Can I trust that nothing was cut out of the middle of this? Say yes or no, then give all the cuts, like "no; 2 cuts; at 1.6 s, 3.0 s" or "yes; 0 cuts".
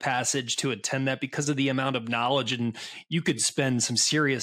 yes; 0 cuts